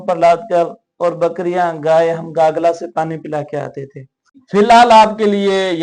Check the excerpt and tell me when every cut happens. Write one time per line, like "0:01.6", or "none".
0:04.4